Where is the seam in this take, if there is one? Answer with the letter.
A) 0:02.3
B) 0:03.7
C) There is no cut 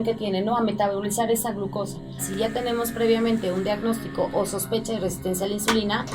A